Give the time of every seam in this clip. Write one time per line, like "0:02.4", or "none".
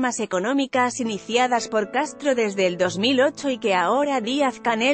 0:01.7